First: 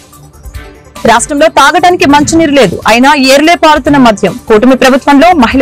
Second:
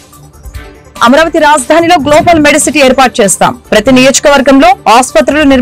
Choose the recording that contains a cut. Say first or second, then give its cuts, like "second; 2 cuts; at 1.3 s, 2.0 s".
first; 1 cut; at 1.0 s